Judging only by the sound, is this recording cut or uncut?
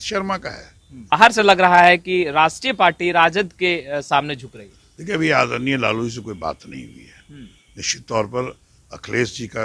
cut